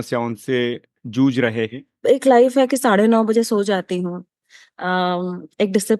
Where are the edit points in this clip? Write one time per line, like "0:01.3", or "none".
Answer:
0:02.0